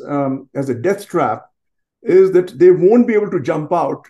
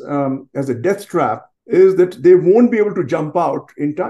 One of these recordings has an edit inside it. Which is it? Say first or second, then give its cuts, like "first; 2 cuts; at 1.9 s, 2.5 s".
second; 1 cut; at 1.5 s